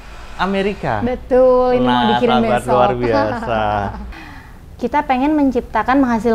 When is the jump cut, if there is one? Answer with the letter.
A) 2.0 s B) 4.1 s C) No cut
B